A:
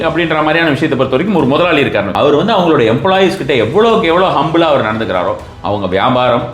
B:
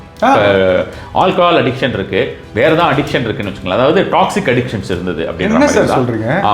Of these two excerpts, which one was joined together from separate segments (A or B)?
A